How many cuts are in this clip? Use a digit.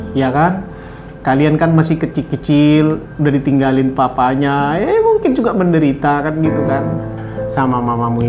1